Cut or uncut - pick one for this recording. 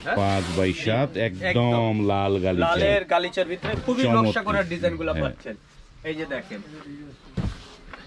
uncut